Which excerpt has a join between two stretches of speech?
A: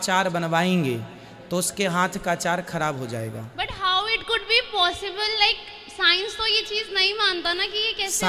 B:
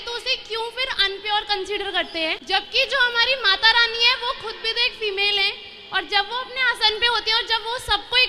B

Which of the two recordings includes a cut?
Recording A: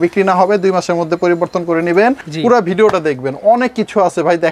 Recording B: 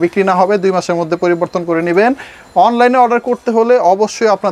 A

